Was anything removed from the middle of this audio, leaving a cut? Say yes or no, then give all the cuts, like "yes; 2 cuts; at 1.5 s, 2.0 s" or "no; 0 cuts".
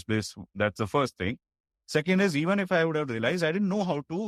no; 0 cuts